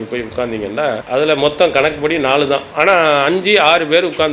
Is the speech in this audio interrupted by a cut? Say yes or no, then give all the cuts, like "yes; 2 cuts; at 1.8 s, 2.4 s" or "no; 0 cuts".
yes; 2 cuts; at 1.0 s, 2.7 s